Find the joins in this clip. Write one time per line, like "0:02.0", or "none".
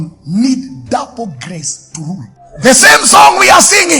0:02.4